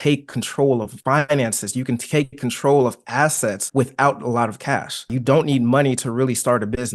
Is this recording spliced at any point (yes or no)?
yes